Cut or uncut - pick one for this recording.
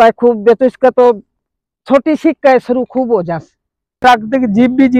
cut